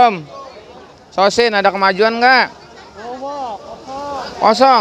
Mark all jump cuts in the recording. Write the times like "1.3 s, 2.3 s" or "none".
none